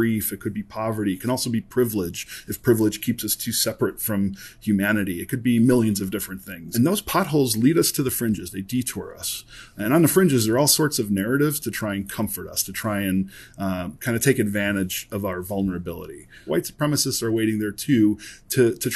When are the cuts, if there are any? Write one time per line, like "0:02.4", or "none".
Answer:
0:06.6
0:16.5